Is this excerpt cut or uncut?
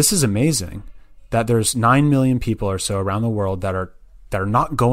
uncut